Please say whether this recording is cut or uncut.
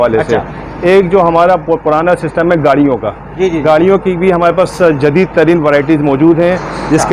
uncut